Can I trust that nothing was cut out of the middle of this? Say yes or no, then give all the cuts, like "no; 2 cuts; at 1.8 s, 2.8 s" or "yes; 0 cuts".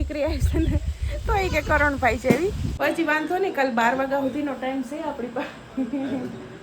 no; 1 cut; at 2.7 s